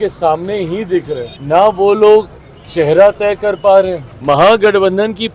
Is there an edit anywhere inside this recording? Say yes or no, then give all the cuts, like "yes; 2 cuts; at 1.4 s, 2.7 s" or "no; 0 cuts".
yes; 2 cuts; at 1.3 s, 4.1 s